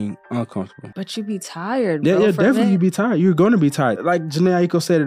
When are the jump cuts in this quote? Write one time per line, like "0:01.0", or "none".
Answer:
0:00.9
0:04.0

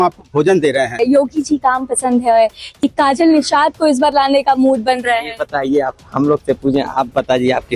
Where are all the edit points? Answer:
0:01.0

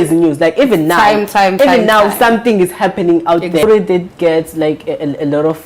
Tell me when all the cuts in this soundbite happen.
0:03.6

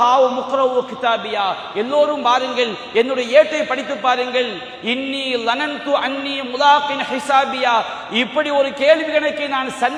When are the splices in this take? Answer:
none

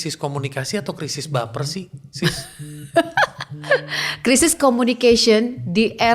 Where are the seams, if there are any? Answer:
none

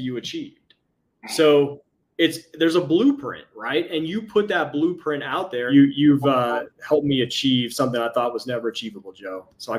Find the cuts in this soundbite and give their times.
0:05.7

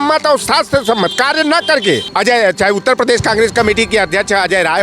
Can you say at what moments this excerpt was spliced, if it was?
0:02.1

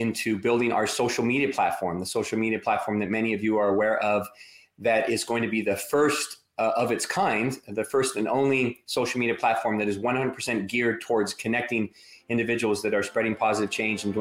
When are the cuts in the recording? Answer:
none

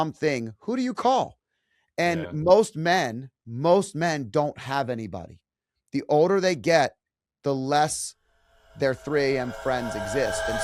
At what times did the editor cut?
none

